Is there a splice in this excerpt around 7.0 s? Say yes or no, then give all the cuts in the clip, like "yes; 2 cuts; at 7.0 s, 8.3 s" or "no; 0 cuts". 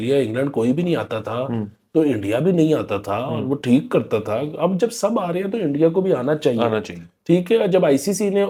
no; 0 cuts